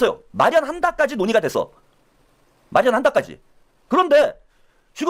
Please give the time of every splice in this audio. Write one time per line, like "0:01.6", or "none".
none